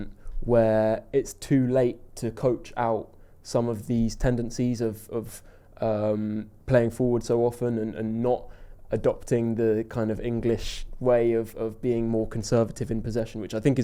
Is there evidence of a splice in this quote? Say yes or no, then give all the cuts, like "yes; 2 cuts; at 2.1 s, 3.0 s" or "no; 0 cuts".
no; 0 cuts